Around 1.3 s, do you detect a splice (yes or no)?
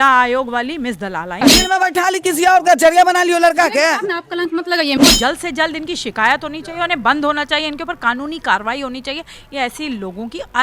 yes